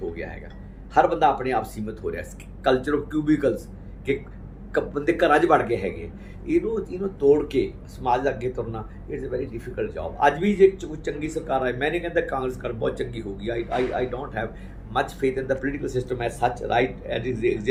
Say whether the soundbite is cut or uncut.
uncut